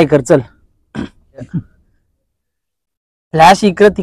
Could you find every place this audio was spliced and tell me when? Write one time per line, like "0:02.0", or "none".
0:01.5